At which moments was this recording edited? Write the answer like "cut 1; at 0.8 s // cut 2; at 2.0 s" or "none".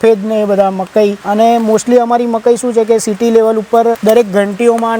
cut 1; at 1.2 s // cut 2; at 4.0 s